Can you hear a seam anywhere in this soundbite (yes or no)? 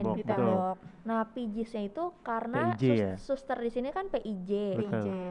no